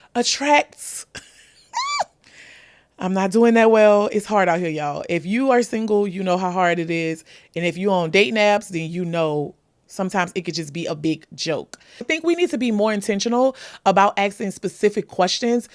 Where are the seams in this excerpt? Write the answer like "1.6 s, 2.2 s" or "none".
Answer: 12.1 s

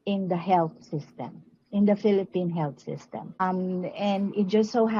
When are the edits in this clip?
3.4 s

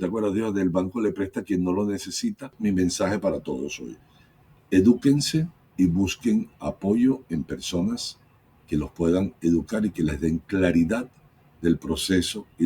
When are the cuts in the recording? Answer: 2.5 s

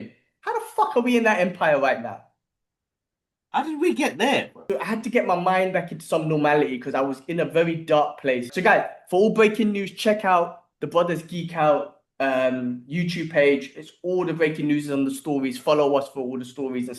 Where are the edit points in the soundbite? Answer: 4.6 s, 8.5 s

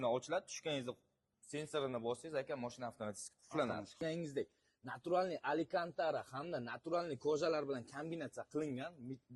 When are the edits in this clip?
3.9 s

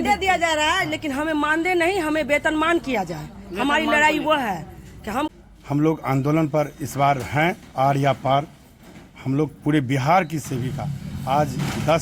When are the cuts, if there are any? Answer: 5.3 s

